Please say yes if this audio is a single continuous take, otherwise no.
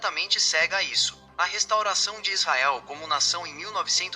no